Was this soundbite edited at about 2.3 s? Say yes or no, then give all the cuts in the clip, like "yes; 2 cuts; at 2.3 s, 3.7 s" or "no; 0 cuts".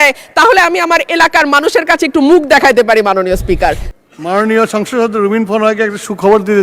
no; 1 cut; at 3.8 s